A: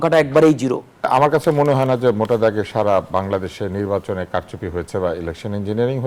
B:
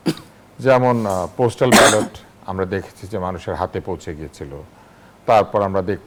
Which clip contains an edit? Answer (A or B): A